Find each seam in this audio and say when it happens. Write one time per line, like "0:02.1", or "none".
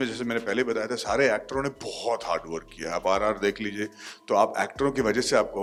none